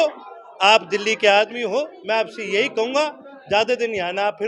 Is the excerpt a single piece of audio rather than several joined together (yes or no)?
yes